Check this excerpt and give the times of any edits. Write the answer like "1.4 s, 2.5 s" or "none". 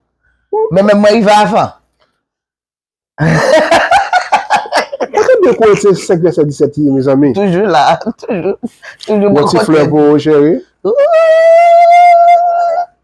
none

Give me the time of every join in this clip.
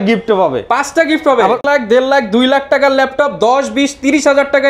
1.6 s

